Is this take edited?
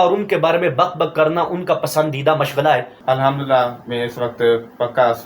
yes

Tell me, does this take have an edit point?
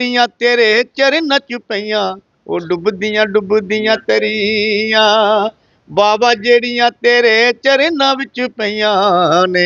no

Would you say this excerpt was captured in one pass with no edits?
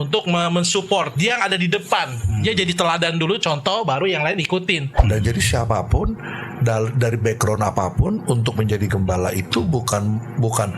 no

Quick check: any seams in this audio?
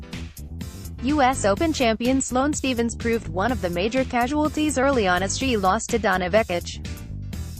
yes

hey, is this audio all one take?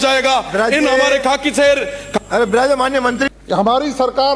no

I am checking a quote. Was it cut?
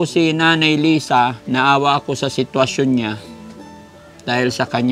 no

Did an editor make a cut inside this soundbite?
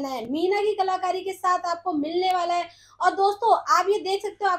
no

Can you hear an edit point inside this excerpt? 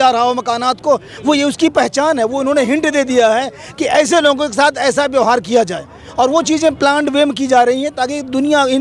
no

